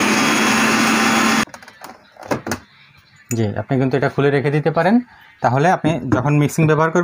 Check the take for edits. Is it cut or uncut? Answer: cut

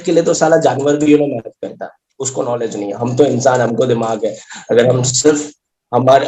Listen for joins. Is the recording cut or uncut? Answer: uncut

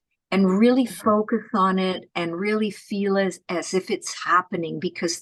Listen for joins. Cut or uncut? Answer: uncut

